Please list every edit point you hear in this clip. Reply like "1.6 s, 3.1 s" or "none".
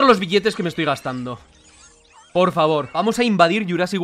2.9 s